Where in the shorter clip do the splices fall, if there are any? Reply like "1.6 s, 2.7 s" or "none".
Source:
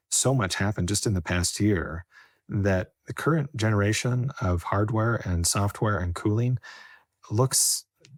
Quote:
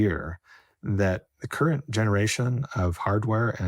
none